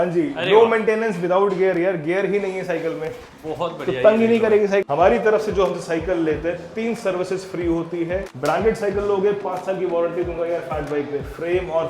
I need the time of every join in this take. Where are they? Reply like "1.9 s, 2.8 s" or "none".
4.9 s, 8.3 s